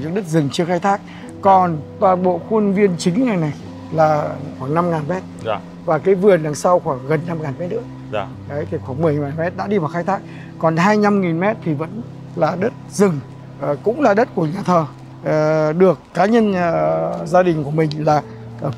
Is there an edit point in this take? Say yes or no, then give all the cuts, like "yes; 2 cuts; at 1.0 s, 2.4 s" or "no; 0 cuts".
no; 0 cuts